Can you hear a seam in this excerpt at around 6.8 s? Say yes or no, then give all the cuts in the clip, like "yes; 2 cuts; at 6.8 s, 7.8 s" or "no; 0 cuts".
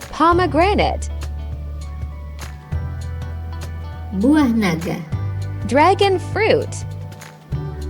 yes; 1 cut; at 6.8 s